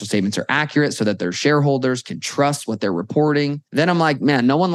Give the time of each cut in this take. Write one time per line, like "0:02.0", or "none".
0:03.6